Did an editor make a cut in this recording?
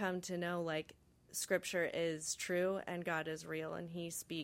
no; 0 cuts

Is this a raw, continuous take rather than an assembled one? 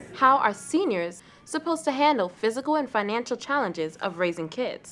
no; 1 cut; at 1.2 s

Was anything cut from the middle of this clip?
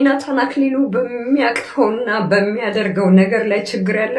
no; 0 cuts

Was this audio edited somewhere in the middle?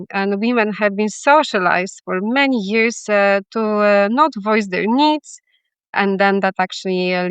yes; 1 cut; at 5.9 s

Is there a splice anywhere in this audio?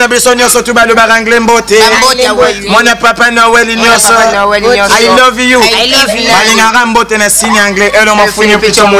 no; 0 cuts

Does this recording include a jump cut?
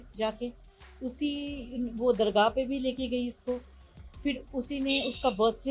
no; 0 cuts

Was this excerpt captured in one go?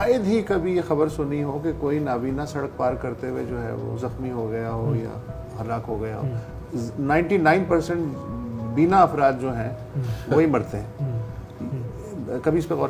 yes; 0 cuts

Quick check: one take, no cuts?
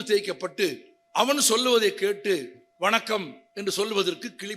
no; 3 cuts; at 0.9 s, 2.6 s, 3.4 s

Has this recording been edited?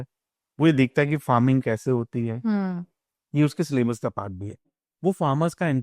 yes; 1 cut; at 4.8 s

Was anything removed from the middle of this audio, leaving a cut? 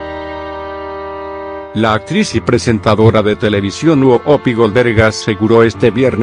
yes; 1 cut; at 1.7 s

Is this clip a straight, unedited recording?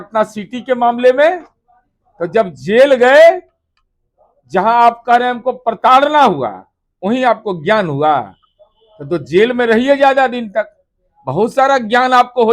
yes; 0 cuts

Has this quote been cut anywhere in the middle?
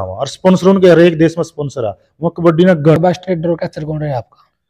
yes; 1 cut; at 3.0 s

